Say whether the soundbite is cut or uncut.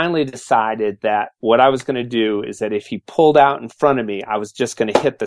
uncut